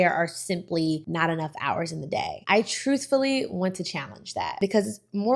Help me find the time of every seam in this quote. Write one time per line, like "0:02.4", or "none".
0:01.0
0:04.5

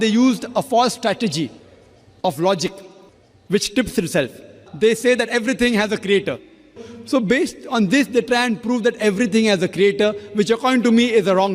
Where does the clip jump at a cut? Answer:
0:04.6
0:06.9

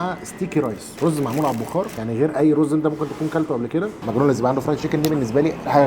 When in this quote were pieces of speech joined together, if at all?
0:02.0
0:04.0

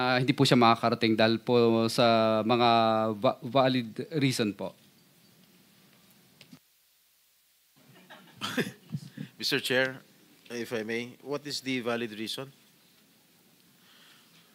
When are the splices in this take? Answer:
none

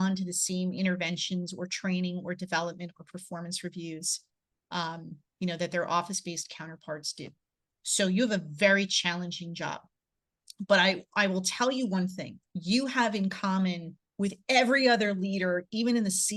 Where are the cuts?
none

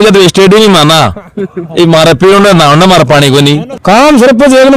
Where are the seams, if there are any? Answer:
0:03.7

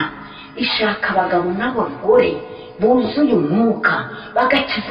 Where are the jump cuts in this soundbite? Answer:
none

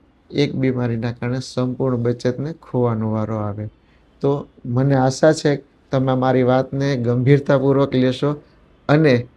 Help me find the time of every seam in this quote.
none

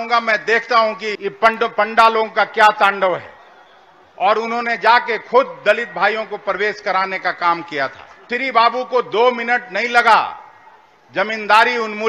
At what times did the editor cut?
0:01.1
0:08.2

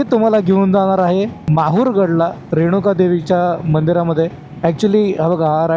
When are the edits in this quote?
0:01.4
0:02.4
0:04.4

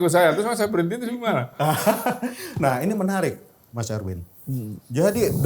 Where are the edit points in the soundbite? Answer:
none

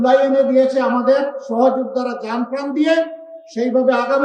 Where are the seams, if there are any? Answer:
none

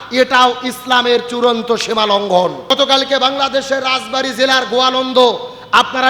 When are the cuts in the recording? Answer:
0:02.7

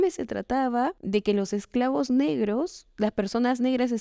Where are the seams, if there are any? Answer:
0:01.0

